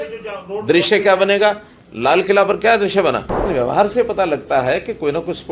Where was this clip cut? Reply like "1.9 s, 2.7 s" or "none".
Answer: 3.3 s